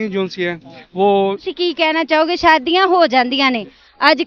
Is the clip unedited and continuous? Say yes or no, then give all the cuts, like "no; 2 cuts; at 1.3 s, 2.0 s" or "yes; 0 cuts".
no; 1 cut; at 1.5 s